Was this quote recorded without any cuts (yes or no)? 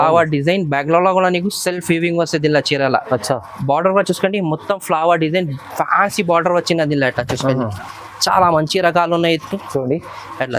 yes